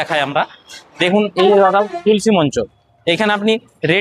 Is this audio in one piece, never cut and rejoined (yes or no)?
yes